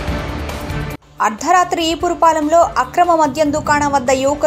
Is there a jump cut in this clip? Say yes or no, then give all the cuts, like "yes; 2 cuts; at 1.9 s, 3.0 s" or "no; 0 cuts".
yes; 1 cut; at 0.9 s